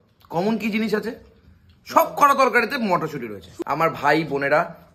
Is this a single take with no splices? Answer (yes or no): no